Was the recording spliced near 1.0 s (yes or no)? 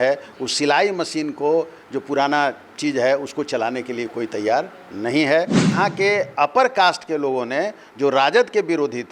no